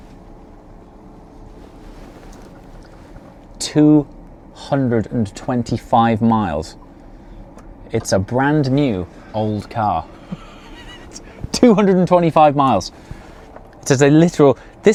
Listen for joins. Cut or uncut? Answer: uncut